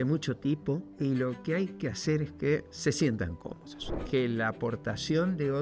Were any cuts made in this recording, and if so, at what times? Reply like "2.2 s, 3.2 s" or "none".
0.9 s, 2.7 s, 4.0 s